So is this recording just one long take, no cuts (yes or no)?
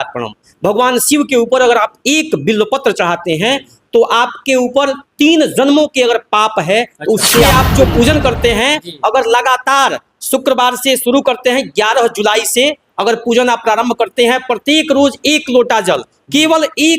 no